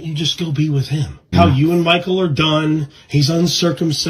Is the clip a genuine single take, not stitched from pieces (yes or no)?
no